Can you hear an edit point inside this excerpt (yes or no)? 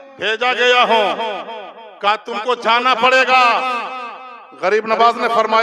no